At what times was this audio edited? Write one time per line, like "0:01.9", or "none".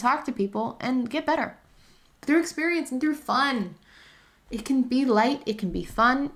none